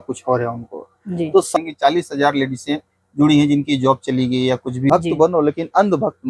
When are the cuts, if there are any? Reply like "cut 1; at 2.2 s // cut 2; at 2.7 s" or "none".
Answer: cut 1; at 1.6 s // cut 2; at 4.9 s